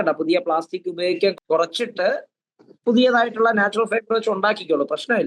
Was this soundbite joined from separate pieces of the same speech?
yes; 1 cut; at 1.4 s

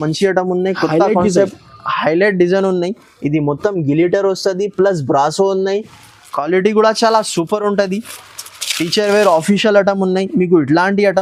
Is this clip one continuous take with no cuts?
yes; 0 cuts

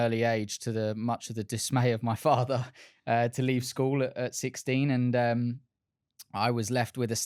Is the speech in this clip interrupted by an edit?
no; 0 cuts

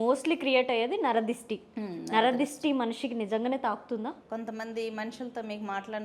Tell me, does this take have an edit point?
yes; 1 cut; at 4.2 s

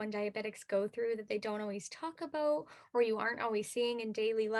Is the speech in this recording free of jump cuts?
yes; 0 cuts

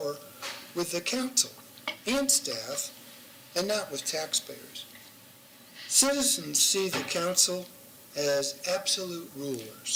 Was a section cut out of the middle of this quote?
no; 0 cuts

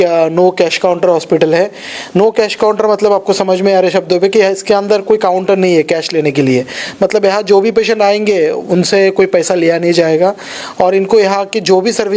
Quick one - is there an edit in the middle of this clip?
no; 0 cuts

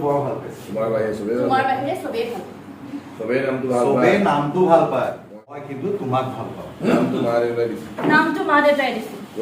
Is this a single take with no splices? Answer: no; 1 cut; at 5.6 s

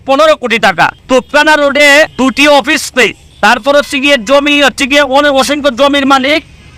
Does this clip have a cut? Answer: yes; 3 cuts; at 1.0 s, 2.1 s, 3.2 s

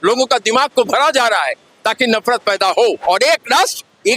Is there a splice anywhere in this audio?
yes; 1 cut; at 3.0 s

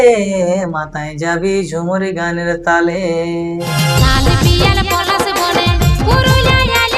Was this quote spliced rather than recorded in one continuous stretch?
yes; 1 cut; at 3.6 s

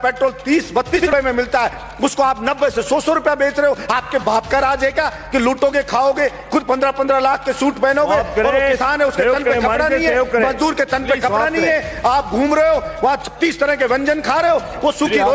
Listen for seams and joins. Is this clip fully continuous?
no; 1 cut; at 1.0 s

